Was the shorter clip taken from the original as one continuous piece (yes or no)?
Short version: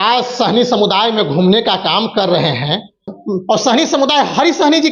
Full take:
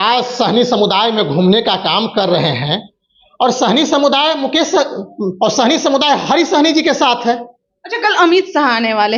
no